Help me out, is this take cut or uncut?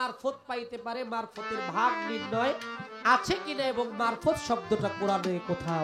uncut